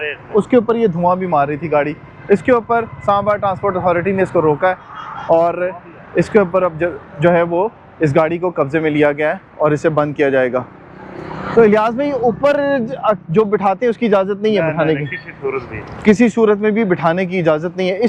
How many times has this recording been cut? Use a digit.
0